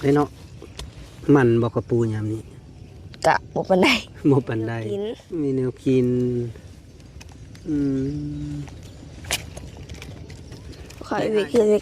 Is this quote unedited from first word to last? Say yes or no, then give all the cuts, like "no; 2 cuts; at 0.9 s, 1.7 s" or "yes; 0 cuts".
no; 2 cuts; at 5.2 s, 10.9 s